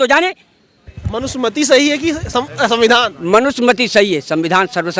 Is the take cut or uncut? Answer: cut